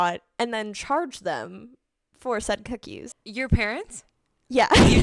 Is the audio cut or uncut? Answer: cut